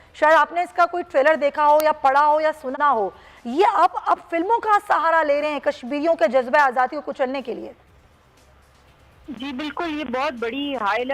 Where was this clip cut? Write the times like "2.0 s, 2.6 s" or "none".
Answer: 2.7 s